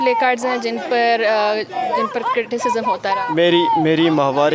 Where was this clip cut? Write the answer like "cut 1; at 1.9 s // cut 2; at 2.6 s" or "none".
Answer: none